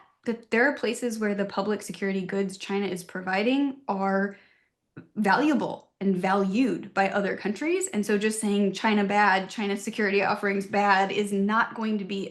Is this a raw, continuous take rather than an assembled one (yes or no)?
yes